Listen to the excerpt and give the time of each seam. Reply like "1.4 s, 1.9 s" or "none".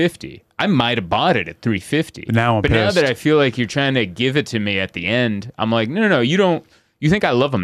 none

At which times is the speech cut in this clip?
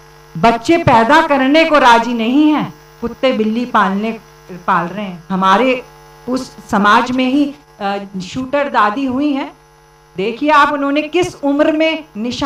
5.2 s

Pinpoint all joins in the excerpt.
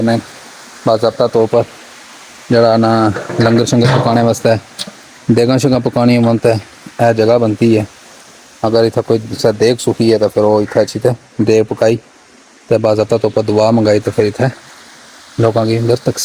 none

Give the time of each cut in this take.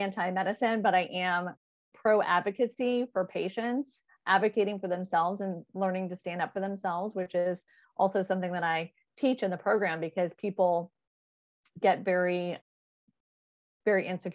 none

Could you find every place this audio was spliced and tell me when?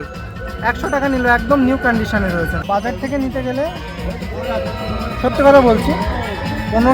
2.5 s

